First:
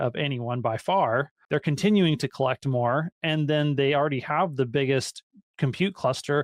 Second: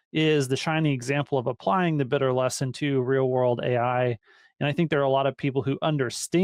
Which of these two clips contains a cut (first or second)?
first